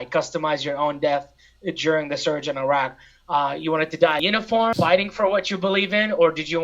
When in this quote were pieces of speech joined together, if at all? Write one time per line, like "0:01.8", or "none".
none